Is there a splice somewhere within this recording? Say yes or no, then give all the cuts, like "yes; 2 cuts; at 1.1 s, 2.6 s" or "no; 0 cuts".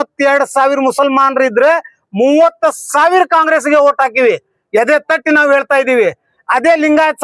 no; 0 cuts